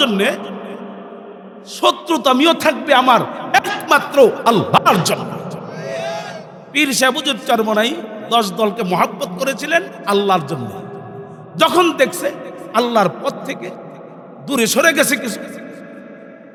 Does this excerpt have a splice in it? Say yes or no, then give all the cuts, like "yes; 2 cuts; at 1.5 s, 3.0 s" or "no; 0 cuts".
no; 0 cuts